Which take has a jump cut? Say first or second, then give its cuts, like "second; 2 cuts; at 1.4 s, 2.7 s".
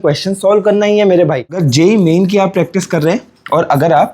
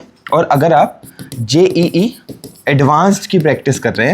first; 1 cut; at 1.6 s